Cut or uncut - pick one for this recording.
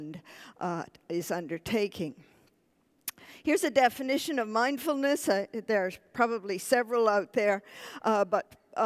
cut